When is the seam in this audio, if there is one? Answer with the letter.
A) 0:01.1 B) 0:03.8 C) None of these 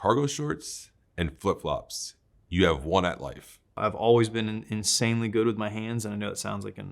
B